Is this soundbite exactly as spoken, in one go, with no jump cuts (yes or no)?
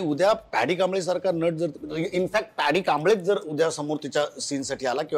yes